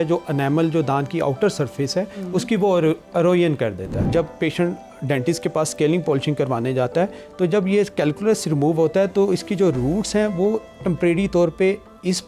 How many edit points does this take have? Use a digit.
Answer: 1